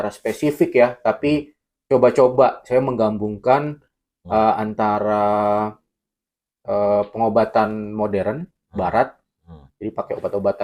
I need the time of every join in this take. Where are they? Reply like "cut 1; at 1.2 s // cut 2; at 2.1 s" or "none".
none

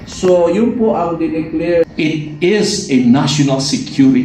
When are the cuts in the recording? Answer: cut 1; at 1.9 s

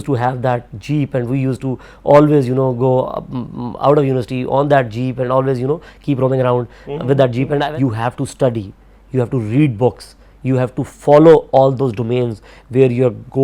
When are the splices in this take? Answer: cut 1; at 7.7 s

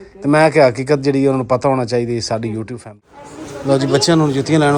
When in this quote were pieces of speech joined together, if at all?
cut 1; at 2.8 s

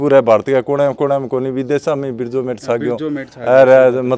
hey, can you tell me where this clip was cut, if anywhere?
none

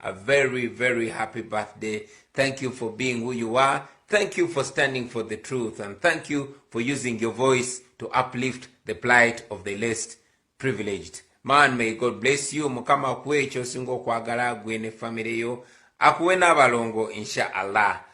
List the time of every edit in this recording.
cut 1; at 17.2 s

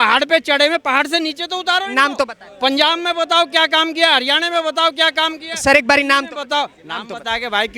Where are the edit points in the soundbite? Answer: none

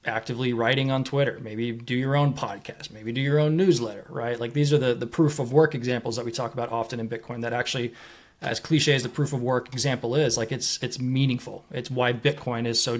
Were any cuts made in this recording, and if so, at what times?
none

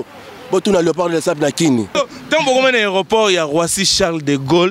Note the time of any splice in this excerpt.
cut 1; at 1.9 s

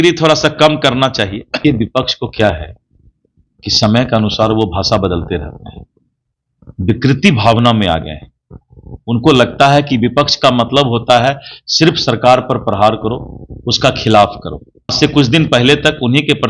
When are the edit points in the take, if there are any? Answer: cut 1; at 1.6 s // cut 2; at 14.9 s

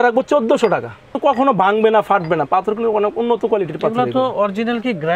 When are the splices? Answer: cut 1; at 1.2 s

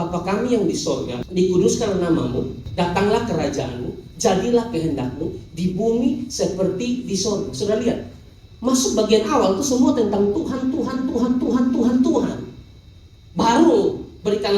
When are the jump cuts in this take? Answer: cut 1; at 1.2 s // cut 2; at 2.6 s

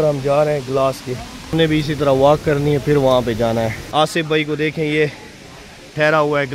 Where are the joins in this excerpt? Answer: cut 1; at 1.5 s // cut 2; at 3.8 s

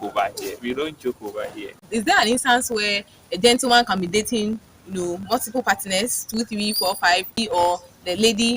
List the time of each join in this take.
cut 1; at 1.8 s // cut 2; at 7.4 s

